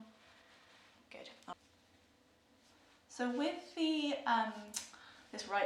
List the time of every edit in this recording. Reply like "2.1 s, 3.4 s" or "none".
1.5 s